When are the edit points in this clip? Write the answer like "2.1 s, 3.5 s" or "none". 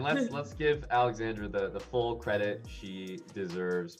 none